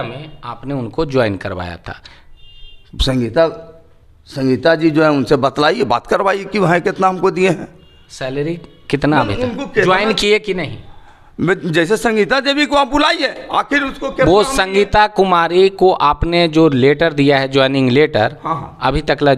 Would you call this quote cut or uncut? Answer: uncut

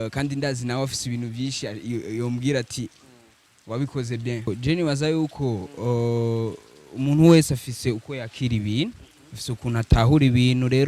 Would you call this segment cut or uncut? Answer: cut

